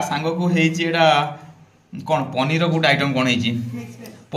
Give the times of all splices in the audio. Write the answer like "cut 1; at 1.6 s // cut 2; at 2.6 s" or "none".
none